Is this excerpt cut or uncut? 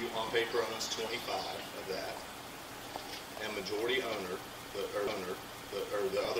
uncut